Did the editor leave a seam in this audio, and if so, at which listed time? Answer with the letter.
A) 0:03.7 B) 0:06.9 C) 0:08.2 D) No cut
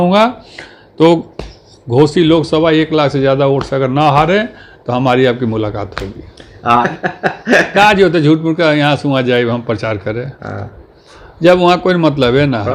B